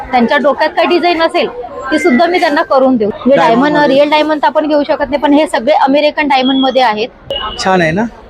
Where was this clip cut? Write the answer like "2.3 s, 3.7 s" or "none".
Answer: 3.1 s, 7.3 s